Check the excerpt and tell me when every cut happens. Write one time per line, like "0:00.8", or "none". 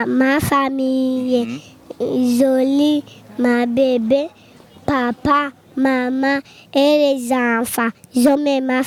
none